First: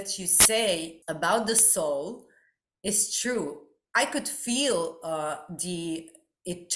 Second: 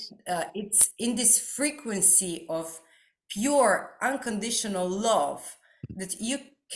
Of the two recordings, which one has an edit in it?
first; 1 cut; at 1.0 s

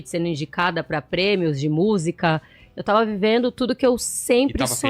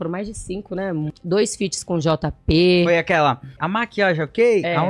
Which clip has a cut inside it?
second; 2 cuts; at 1.1 s, 3.6 s

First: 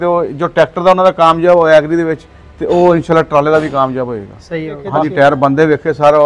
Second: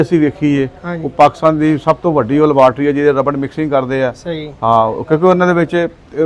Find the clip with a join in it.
first; 1 cut; at 4.8 s

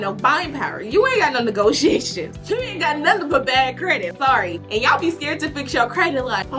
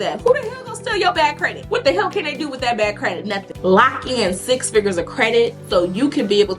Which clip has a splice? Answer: second; 1 cut; at 3.5 s

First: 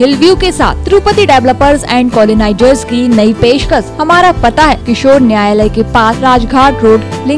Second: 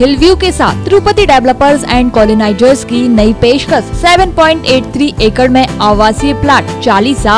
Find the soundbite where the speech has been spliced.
first; 3 cuts; at 3.9 s, 4.8 s, 6.2 s

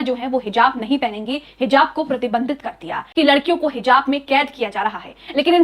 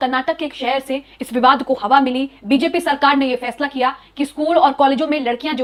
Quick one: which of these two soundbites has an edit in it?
first; 1 cut; at 3.0 s

